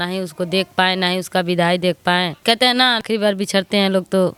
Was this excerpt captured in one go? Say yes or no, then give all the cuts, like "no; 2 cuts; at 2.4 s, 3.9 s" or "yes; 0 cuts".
yes; 0 cuts